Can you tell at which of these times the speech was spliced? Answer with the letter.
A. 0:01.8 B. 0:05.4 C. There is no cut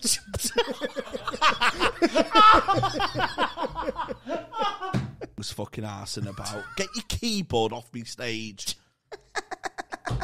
B